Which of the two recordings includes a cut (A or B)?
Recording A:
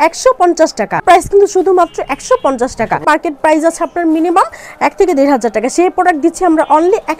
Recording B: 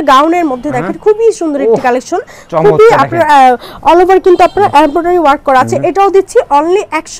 A